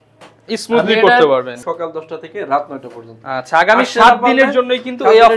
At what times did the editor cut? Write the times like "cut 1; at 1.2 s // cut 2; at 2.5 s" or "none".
cut 1; at 1.5 s